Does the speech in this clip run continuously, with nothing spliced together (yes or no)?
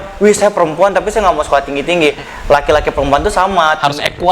no